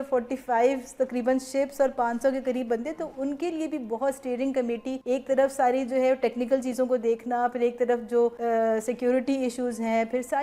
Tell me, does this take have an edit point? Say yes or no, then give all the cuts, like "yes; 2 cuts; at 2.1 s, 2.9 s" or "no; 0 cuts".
yes; 2 cuts; at 4.9 s, 8.4 s